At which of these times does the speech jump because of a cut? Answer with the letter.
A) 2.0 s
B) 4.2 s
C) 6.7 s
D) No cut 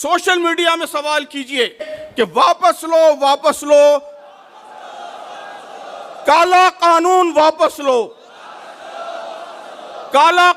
A